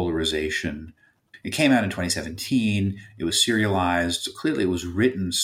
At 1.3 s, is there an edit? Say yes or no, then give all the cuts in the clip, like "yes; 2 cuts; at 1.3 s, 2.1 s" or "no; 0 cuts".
yes; 1 cut; at 1.3 s